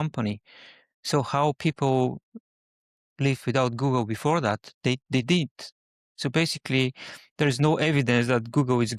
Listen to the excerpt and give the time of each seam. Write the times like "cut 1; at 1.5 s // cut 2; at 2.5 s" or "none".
none

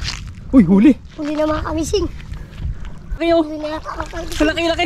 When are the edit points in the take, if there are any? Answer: cut 1; at 3.2 s

